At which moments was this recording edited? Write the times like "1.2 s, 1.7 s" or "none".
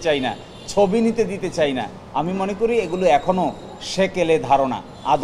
none

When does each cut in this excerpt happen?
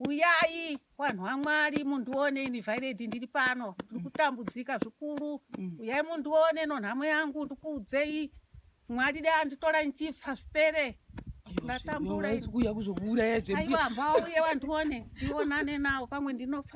none

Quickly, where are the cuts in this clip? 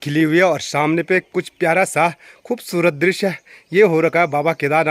none

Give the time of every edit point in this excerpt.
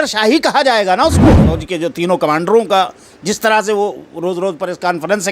1.5 s

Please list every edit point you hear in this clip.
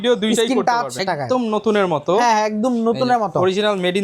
1.0 s

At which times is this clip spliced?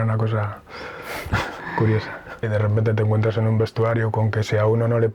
2.5 s

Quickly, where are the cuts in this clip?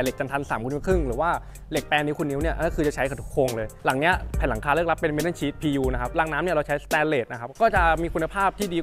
3.7 s, 6.1 s, 7.6 s

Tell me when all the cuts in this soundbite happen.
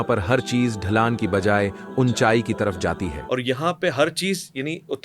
3.1 s

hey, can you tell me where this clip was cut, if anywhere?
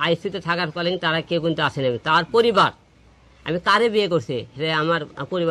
none

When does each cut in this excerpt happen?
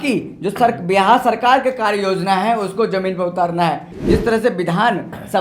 3.9 s

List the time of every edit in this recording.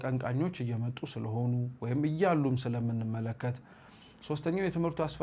none

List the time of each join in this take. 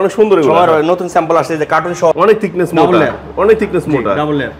2.1 s

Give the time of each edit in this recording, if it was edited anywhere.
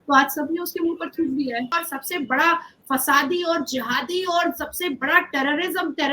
1.7 s

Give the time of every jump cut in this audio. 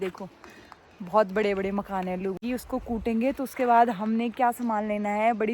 2.4 s

